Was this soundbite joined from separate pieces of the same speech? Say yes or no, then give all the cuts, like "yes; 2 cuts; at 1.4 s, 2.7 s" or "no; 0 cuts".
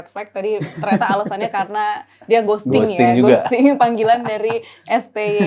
no; 0 cuts